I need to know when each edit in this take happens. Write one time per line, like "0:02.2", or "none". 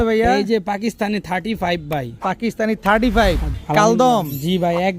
0:03.5